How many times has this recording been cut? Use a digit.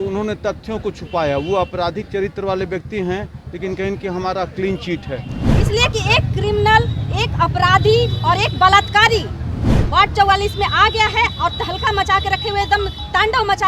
1